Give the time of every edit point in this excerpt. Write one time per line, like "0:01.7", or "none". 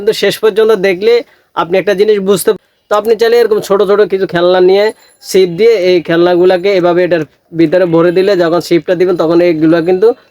0:02.6